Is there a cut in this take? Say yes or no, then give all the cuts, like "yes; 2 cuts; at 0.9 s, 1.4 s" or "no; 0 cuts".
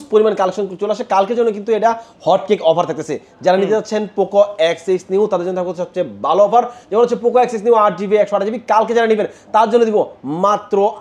no; 0 cuts